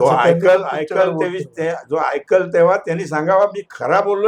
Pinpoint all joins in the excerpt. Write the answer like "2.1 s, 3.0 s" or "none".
none